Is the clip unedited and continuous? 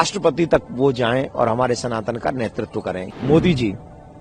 no; 1 cut; at 3.1 s

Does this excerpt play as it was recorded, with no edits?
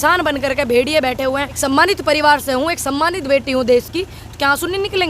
no; 1 cut; at 1.6 s

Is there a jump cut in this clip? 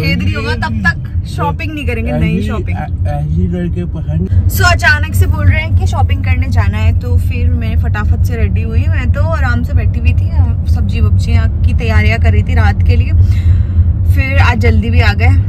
no; 0 cuts

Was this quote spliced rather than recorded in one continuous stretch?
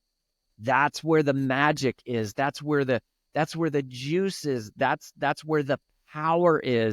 no; 0 cuts

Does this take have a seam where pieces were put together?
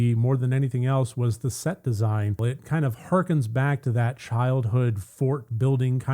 yes; 1 cut; at 2.5 s

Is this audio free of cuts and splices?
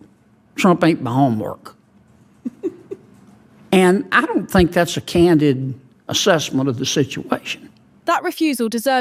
yes; 0 cuts

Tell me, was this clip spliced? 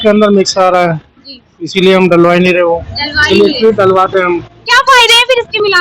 yes; 1 cut; at 4.5 s

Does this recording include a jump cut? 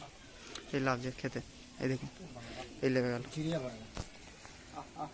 no; 0 cuts

